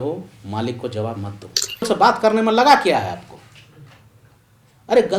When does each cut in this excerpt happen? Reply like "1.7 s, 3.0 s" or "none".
1.8 s